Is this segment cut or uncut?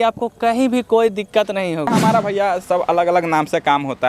cut